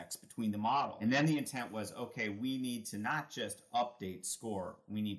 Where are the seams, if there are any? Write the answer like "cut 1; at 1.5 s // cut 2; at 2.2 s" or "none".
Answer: cut 1; at 0.9 s